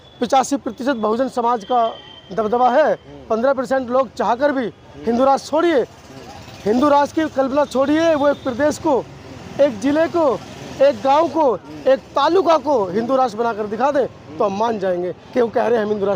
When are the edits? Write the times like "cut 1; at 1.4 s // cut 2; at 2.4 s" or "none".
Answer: none